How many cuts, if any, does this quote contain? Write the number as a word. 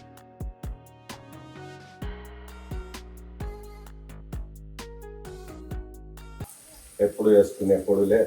one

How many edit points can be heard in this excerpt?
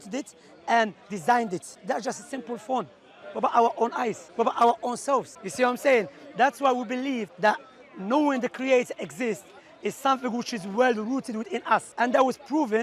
five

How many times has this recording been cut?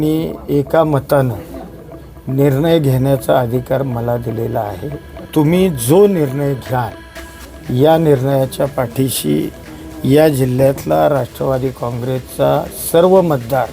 one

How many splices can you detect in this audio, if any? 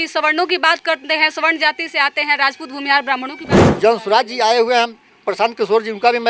one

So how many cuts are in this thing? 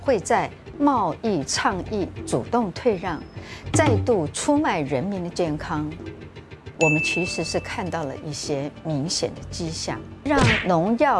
one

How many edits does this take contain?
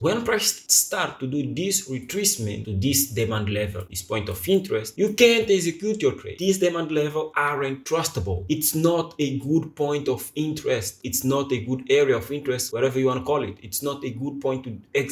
zero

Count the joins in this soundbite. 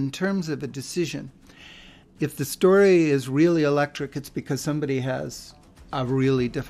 one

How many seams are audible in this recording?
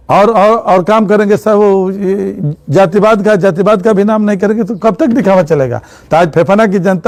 zero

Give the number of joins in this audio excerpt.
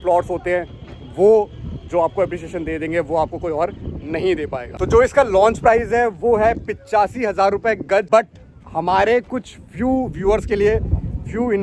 one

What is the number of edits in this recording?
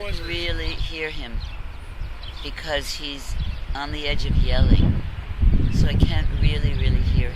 one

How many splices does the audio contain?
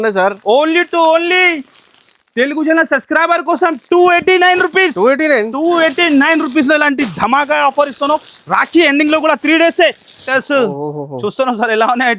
one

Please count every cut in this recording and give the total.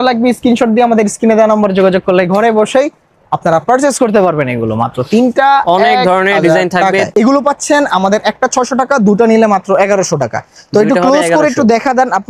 one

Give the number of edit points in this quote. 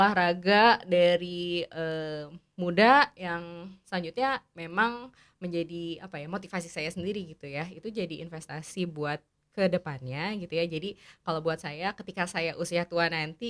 zero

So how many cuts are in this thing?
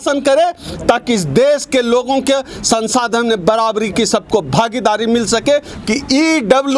one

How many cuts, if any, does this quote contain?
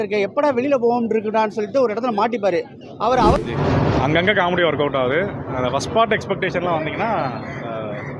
one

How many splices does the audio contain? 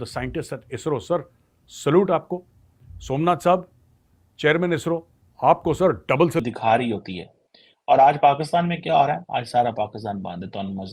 one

